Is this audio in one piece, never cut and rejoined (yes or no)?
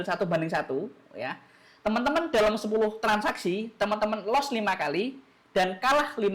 yes